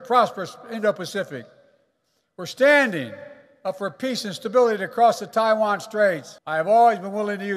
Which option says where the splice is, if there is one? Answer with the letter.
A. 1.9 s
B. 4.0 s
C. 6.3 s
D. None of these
C